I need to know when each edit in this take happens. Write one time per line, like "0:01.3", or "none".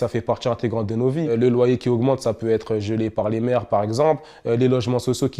0:01.3